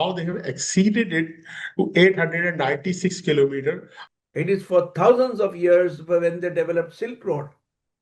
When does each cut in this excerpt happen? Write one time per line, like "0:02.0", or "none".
0:03.9